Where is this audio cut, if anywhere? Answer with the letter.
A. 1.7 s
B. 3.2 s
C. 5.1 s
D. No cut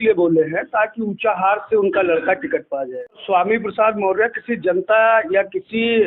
B